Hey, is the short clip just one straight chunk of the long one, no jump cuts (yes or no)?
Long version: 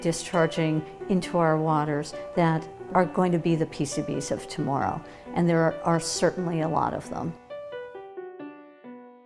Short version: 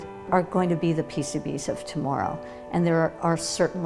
yes